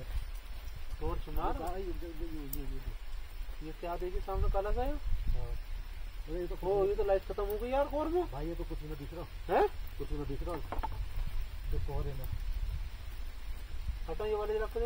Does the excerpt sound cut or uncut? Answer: uncut